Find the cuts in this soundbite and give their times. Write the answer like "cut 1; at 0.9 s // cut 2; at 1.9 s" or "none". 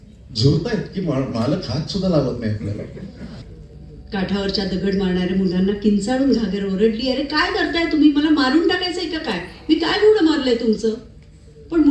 cut 1; at 3.4 s